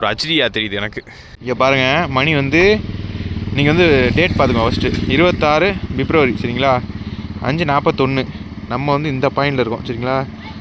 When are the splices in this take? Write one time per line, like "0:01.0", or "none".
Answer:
0:01.3